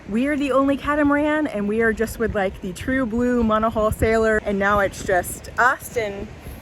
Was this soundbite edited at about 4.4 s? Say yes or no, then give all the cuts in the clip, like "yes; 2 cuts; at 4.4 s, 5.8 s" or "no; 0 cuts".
yes; 1 cut; at 4.4 s